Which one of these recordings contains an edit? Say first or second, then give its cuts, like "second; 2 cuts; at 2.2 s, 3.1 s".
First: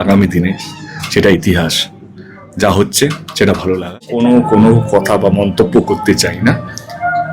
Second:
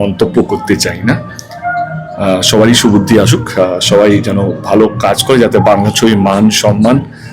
first; 1 cut; at 4.1 s